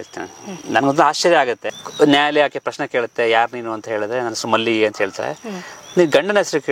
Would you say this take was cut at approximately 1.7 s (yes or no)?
yes